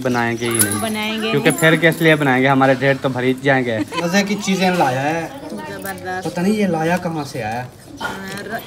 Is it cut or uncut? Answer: cut